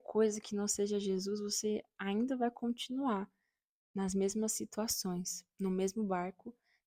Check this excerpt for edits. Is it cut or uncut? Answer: uncut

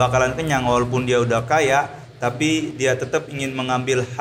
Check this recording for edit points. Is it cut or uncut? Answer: uncut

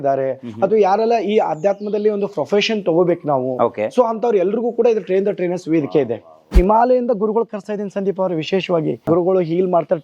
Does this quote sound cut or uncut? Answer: cut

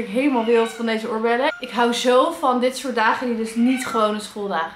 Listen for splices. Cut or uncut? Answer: cut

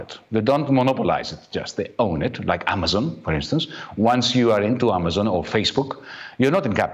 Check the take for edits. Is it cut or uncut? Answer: uncut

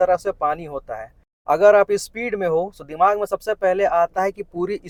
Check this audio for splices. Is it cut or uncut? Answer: uncut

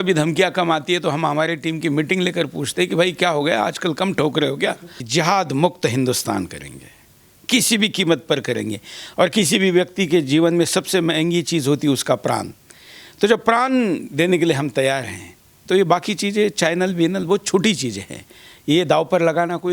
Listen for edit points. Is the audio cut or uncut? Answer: cut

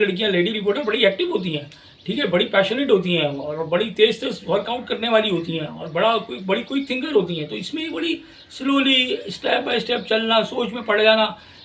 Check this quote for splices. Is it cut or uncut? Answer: uncut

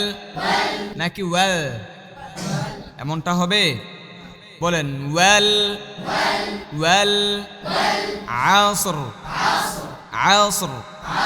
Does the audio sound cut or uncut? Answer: cut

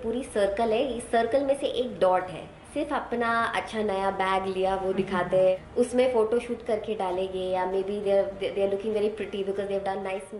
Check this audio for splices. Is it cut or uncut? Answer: cut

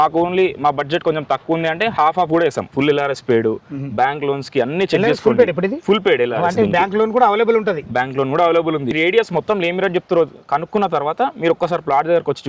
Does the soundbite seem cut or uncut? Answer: cut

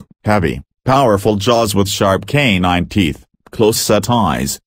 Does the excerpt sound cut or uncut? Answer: uncut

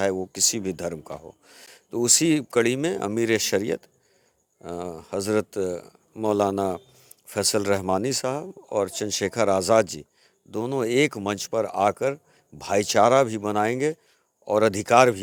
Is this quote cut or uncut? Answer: uncut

